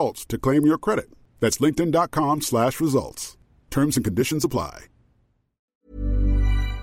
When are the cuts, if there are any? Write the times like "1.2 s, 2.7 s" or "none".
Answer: 5.8 s